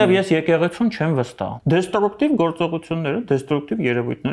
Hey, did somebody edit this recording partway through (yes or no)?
yes